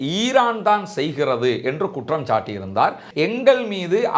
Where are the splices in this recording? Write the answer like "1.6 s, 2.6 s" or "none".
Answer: 3.0 s